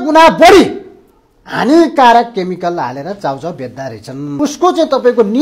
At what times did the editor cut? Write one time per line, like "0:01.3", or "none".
0:04.4